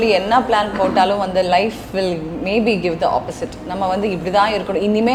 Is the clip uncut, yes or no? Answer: yes